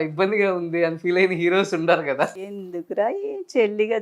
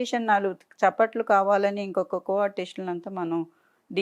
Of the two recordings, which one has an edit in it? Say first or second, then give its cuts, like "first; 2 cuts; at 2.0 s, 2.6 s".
first; 1 cut; at 2.4 s